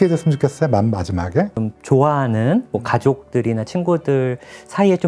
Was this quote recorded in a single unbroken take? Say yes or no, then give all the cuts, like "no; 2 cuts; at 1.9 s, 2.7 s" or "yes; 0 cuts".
no; 1 cut; at 1.6 s